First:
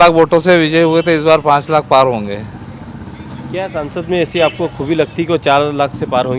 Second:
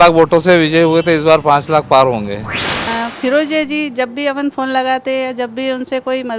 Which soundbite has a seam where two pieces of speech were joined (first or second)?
second